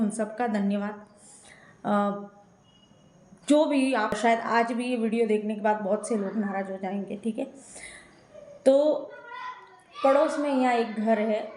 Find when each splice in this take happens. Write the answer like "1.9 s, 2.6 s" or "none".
4.2 s